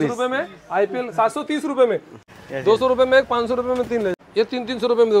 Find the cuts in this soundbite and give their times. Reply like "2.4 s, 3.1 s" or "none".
2.2 s, 4.1 s